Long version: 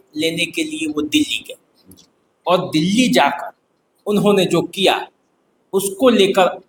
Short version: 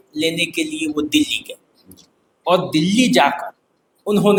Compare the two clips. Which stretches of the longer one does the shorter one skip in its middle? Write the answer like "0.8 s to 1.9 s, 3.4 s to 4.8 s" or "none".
none